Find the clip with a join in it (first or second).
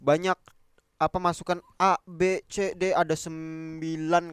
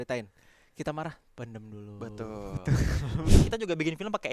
second